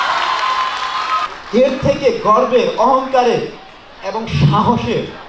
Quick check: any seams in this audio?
yes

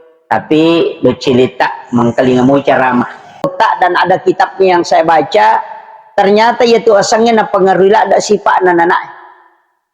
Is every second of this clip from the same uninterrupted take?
no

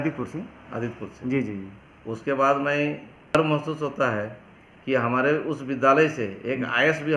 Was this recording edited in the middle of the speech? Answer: yes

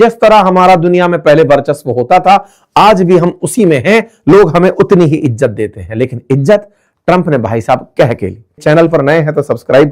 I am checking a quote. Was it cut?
yes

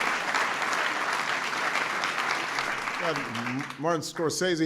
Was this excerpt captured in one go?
no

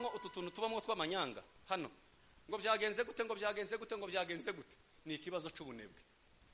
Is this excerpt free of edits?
yes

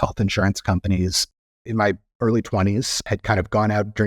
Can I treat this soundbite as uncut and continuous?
no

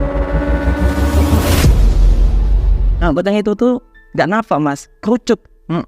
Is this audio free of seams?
no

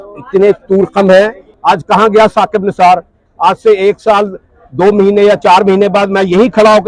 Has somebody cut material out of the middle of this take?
yes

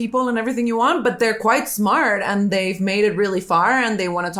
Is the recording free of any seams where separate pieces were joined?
yes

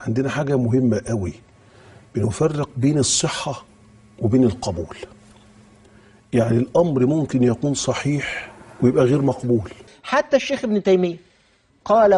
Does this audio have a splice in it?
yes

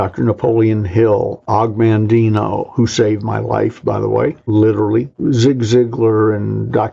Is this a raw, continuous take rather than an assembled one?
no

